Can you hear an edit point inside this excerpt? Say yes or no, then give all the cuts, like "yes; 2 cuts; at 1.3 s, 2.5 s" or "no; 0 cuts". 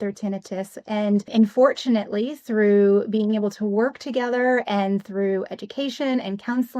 yes; 1 cut; at 1.3 s